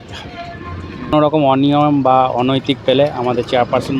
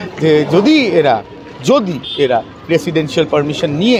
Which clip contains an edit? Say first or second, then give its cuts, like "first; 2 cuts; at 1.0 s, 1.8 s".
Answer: first; 1 cut; at 1.1 s